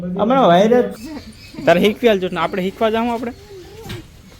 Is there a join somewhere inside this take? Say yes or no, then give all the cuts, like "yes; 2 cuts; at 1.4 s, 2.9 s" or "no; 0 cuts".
yes; 1 cut; at 1.0 s